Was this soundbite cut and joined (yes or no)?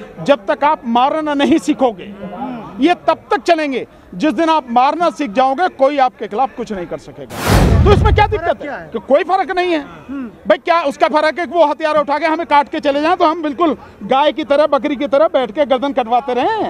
yes